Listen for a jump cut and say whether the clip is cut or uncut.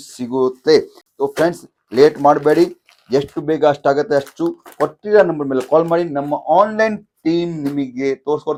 uncut